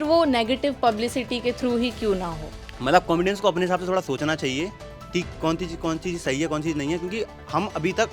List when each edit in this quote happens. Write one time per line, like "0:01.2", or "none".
0:02.6